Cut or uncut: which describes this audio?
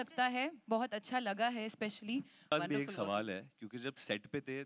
cut